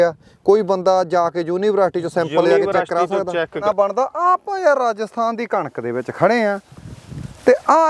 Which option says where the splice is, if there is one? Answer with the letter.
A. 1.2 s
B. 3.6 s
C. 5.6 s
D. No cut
B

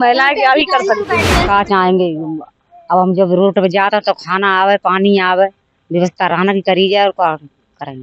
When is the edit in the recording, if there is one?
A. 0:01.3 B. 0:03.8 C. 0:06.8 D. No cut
A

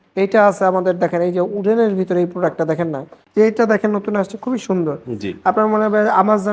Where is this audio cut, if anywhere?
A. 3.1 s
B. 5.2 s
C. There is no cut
A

